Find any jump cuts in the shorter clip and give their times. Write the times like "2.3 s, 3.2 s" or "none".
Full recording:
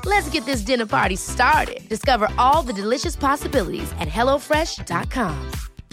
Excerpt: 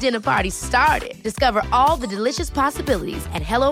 none